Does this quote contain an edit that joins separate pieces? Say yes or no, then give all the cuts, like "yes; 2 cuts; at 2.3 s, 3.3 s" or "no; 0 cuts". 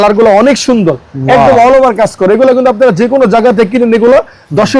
no; 0 cuts